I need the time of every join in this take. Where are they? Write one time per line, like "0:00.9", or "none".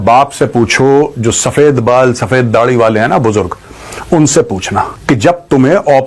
0:04.9